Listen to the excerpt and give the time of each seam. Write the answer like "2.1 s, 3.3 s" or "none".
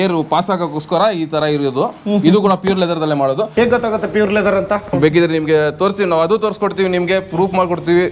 3.5 s, 4.9 s